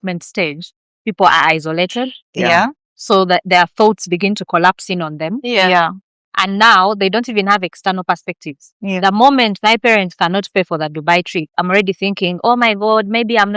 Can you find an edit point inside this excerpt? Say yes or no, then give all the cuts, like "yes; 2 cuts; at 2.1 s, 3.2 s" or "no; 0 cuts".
no; 0 cuts